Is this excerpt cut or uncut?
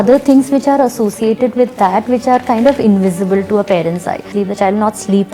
cut